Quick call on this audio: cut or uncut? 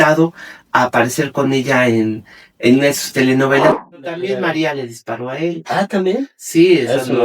cut